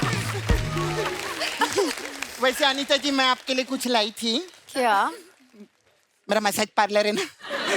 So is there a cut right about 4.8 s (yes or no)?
no